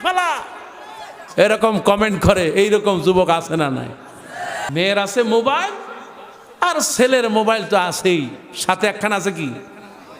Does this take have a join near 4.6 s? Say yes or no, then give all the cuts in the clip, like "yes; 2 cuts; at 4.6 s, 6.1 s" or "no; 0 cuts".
yes; 1 cut; at 4.6 s